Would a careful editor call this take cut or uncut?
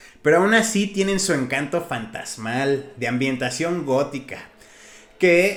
uncut